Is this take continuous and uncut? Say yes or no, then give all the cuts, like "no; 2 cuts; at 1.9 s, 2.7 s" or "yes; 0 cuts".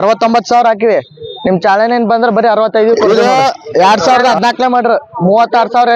no; 1 cut; at 3.0 s